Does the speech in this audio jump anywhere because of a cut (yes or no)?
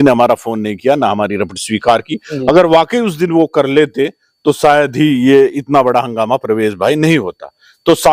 no